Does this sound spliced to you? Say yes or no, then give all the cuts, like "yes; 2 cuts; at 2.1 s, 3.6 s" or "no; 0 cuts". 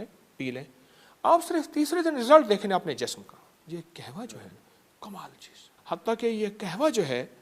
yes; 2 cuts; at 3.6 s, 5.7 s